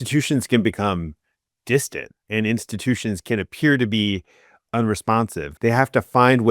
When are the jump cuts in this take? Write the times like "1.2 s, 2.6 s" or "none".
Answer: 5.4 s